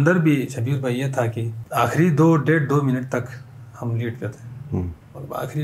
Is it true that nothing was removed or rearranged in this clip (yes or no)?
no